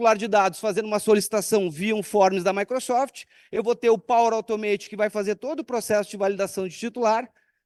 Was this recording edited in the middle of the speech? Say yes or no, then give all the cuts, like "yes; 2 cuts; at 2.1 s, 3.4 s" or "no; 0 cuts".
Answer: no; 0 cuts